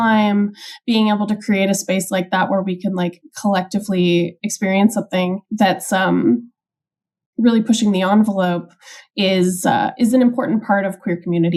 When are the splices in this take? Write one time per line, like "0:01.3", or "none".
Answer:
none